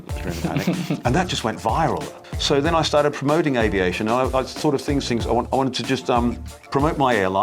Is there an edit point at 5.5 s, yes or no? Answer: yes